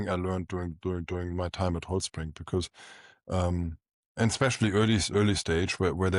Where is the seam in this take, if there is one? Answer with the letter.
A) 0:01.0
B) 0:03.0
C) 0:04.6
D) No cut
D